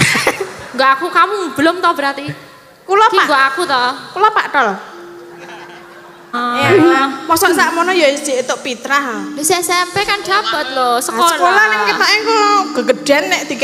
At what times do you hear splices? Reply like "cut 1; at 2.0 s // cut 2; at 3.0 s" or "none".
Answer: cut 1; at 6.3 s